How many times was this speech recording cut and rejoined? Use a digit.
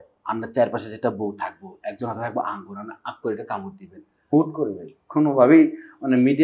1